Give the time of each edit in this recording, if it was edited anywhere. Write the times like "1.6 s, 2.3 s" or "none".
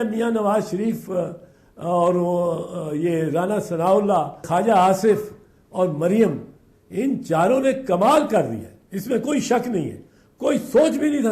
4.4 s